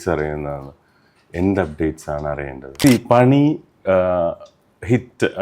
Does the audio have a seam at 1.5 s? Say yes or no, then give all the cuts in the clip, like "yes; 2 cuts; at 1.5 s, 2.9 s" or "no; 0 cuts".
no; 1 cut; at 2.8 s